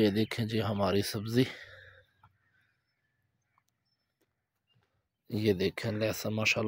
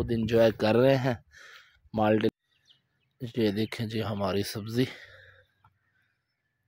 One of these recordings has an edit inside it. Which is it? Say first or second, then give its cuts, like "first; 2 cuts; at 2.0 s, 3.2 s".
second; 1 cut; at 2.3 s